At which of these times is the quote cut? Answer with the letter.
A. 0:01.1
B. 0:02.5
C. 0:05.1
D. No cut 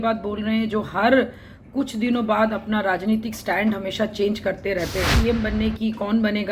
C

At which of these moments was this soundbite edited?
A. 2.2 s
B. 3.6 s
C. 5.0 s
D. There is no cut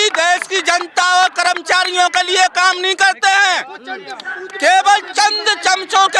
D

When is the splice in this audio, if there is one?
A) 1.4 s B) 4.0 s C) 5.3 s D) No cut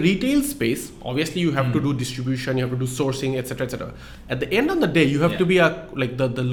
D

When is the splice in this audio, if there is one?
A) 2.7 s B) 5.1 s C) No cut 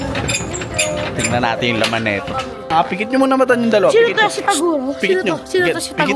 A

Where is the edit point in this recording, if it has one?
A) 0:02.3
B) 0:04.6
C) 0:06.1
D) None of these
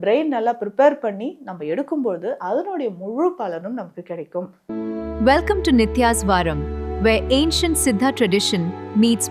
B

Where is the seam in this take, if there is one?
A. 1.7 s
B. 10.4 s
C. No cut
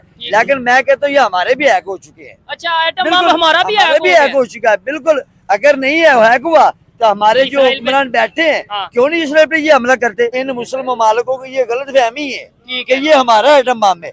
B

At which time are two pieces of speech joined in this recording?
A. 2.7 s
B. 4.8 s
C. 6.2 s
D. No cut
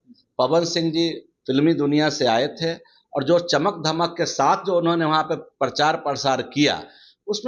D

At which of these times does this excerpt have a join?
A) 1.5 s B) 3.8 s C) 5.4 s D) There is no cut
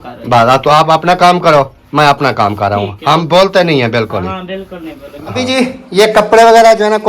C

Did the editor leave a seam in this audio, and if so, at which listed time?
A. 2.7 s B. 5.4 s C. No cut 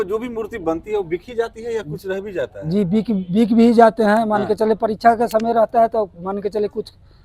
C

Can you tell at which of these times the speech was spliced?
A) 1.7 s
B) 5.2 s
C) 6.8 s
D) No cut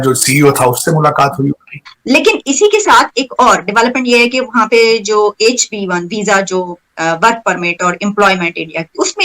A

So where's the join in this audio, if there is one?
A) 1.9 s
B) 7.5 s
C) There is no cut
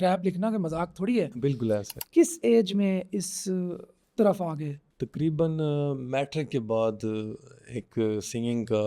A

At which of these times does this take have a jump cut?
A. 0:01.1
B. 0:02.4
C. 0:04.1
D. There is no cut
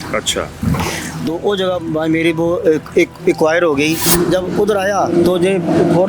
C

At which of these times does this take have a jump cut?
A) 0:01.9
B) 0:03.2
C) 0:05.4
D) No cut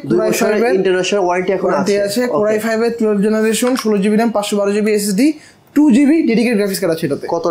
D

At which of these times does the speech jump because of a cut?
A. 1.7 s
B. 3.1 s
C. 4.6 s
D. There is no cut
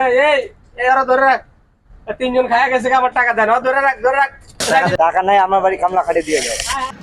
C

